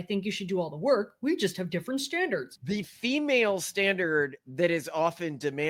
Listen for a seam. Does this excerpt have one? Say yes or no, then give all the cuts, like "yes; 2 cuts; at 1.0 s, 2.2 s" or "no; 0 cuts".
yes; 1 cut; at 2.5 s